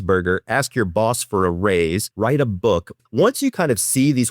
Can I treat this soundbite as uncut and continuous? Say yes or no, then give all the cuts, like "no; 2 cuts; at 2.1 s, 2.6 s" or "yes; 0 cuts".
no; 2 cuts; at 2.1 s, 2.9 s